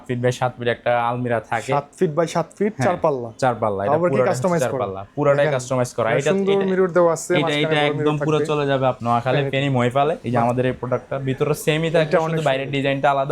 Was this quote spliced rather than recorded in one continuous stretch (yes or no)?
yes